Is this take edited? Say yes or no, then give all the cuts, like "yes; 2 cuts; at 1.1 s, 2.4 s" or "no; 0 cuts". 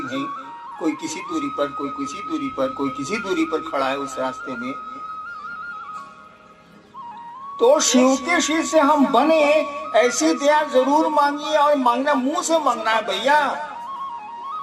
yes; 3 cuts; at 5.0 s, 7.6 s, 13.7 s